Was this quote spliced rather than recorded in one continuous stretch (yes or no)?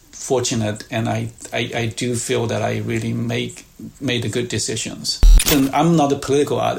yes